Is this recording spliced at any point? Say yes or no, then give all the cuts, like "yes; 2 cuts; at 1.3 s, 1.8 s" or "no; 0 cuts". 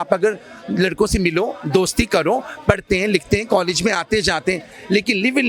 no; 0 cuts